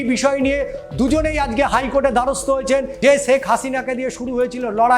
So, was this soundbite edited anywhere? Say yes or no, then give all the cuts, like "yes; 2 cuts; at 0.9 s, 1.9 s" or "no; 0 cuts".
yes; 1 cut; at 2.9 s